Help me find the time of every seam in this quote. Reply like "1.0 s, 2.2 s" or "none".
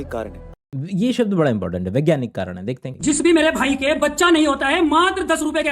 2.8 s